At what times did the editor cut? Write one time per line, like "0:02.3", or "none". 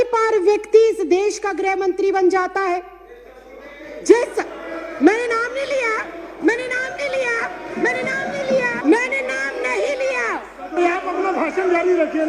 0:08.8